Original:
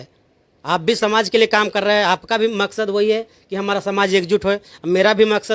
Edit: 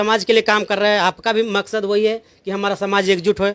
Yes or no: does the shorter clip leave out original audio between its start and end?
no